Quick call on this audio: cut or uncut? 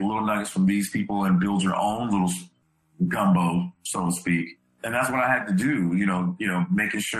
cut